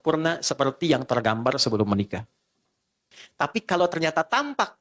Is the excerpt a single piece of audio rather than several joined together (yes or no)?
no